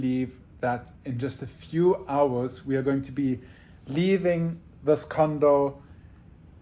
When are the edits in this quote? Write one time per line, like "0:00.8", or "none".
none